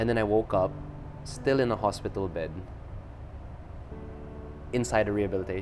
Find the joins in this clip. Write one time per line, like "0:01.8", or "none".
none